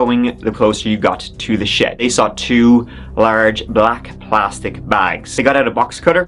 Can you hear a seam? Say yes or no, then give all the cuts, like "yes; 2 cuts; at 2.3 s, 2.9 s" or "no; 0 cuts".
yes; 2 cuts; at 2.0 s, 5.2 s